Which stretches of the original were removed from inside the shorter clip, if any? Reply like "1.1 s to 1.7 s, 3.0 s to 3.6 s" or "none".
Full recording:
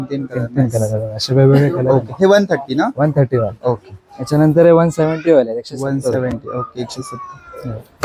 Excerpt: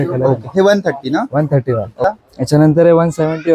3.7 s to 3.8 s